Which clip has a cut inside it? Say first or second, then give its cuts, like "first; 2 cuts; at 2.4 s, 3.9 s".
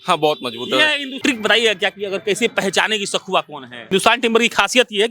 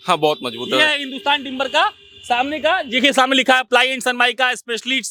first; 2 cuts; at 1.2 s, 3.9 s